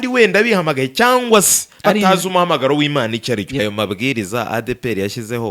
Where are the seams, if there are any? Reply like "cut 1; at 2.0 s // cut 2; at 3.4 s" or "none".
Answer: cut 1; at 3.6 s